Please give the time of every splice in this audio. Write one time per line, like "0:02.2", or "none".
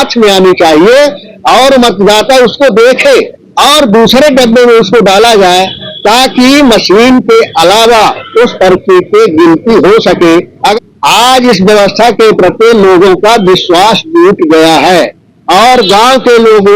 0:10.5